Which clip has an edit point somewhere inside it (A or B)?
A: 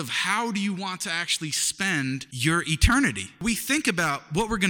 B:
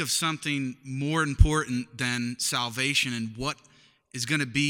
A